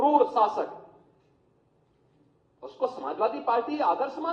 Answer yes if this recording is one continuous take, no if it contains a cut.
yes